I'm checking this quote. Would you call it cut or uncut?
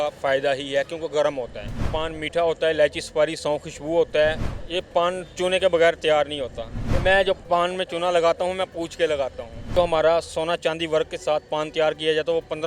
cut